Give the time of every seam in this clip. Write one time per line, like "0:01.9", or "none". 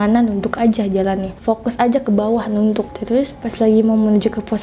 0:01.3
0:03.0